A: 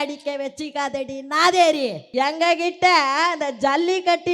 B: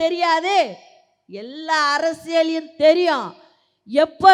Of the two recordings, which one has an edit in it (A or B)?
A